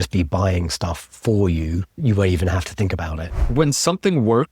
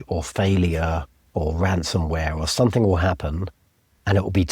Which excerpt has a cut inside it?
first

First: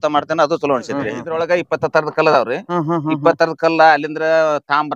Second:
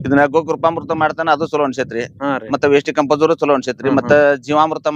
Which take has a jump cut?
first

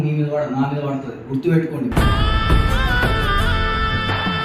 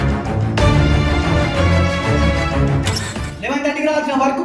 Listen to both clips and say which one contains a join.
second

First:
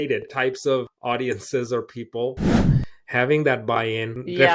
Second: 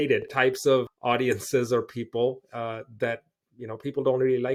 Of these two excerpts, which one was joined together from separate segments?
first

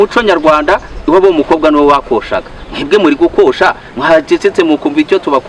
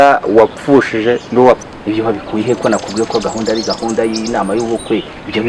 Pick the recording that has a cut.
second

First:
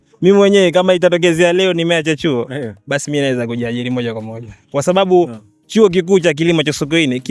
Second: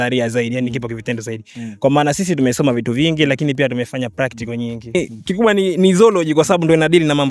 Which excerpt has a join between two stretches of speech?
second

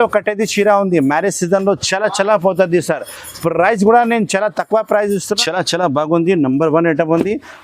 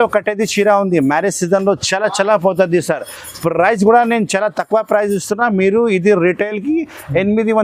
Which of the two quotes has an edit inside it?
first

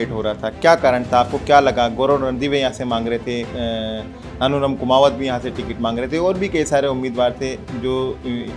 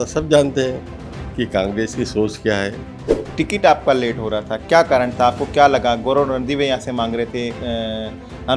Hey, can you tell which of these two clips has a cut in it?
second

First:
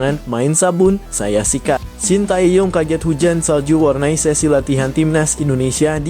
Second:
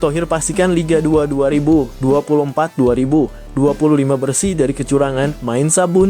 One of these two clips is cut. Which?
first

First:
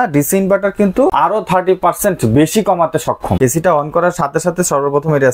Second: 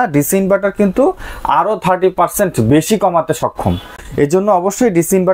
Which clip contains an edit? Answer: first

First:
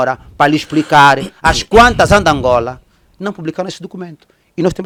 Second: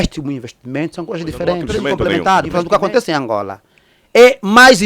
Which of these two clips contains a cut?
second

